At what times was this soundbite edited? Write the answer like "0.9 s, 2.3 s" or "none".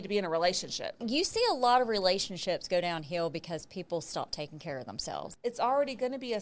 1.0 s, 5.3 s